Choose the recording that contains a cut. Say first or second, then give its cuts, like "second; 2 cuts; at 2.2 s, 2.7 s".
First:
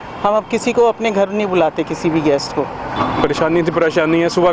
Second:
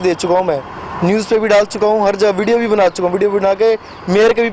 first; 1 cut; at 2.9 s